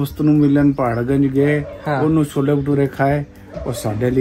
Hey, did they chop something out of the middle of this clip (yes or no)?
no